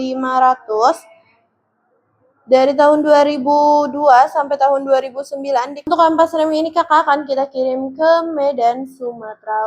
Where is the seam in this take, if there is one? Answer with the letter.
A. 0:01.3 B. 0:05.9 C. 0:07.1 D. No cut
B